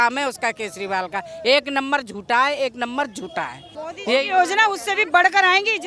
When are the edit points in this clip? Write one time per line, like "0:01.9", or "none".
0:03.7